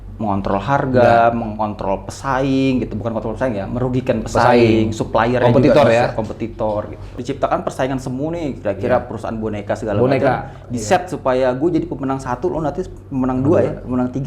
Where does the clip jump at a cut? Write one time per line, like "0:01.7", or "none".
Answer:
0:07.1